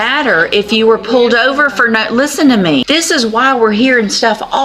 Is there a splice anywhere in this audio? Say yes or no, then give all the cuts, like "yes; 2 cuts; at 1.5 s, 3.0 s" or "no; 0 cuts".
yes; 1 cut; at 2.8 s